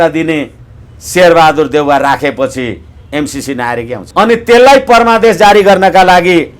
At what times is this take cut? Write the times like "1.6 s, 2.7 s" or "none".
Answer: 4.0 s